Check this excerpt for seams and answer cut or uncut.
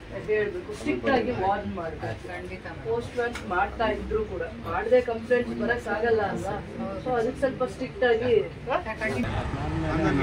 cut